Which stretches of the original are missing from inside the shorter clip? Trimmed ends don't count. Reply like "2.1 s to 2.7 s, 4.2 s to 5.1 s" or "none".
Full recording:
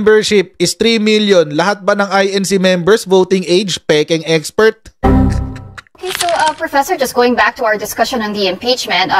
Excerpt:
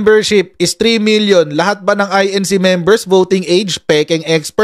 none